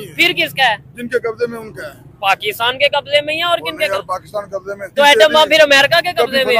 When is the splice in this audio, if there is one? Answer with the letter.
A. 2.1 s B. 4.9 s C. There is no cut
B